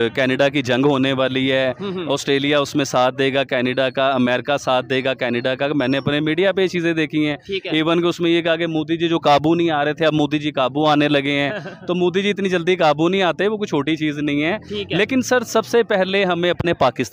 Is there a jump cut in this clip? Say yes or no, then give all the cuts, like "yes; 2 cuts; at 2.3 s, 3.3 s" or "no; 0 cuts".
no; 0 cuts